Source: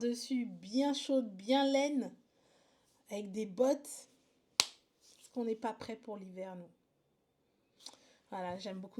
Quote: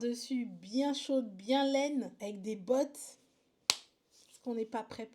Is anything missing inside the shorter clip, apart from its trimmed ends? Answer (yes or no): yes